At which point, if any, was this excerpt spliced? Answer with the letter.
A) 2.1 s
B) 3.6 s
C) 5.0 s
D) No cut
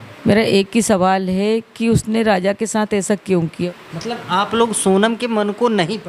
B